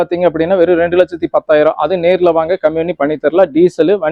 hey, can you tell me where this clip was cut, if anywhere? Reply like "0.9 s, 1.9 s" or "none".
none